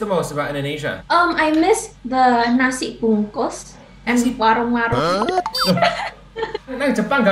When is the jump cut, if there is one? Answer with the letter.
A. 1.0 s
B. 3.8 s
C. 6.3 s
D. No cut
A